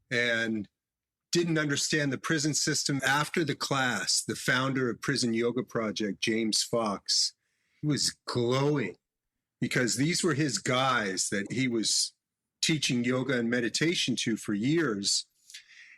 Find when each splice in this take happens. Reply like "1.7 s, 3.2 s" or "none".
3.0 s, 7.8 s